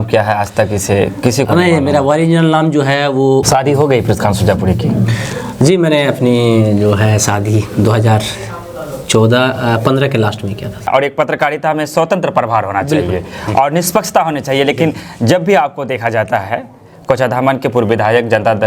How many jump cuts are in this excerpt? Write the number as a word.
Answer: two